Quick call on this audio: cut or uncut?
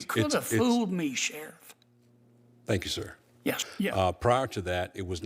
cut